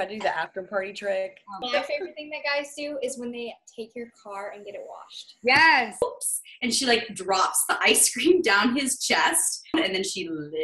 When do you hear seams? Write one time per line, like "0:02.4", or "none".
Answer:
0:01.5
0:06.0
0:09.7